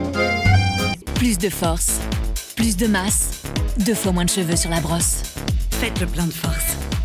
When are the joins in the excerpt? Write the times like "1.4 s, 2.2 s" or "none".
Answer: 1.0 s